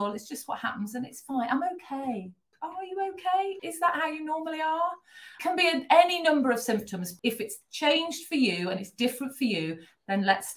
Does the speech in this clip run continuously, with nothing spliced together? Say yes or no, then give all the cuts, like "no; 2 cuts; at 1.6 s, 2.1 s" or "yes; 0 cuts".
no; 4 cuts; at 2.5 s, 3.5 s, 5.3 s, 7.1 s